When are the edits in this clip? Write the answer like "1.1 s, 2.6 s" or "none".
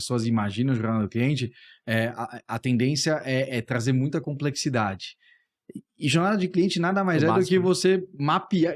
none